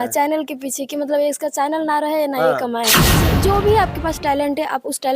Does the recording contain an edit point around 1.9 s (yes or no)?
no